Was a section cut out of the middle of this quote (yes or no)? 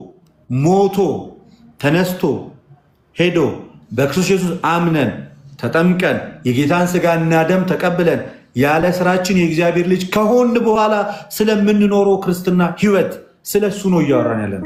no